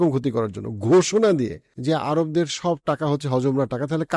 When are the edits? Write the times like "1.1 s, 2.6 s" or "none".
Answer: 1.7 s

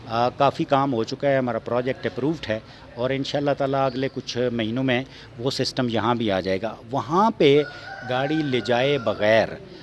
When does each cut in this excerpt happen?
none

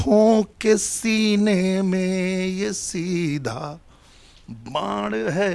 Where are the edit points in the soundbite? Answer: none

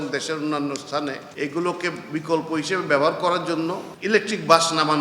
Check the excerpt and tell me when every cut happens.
1.2 s, 3.9 s

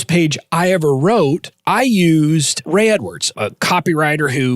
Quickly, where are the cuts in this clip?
1.5 s, 2.6 s, 3.3 s

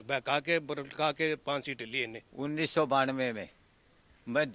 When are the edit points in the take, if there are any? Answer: 2.2 s

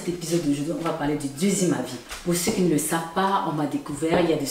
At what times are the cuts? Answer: 2.1 s

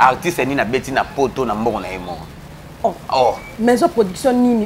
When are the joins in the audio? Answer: none

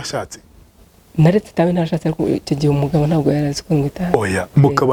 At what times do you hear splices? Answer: none

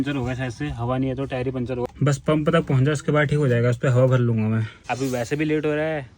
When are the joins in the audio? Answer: 1.8 s, 4.8 s

